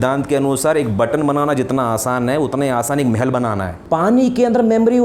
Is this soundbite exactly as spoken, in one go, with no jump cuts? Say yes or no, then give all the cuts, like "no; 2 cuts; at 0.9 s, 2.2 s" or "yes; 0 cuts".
no; 1 cut; at 3.7 s